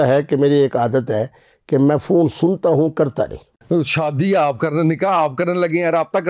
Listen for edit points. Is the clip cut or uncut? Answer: cut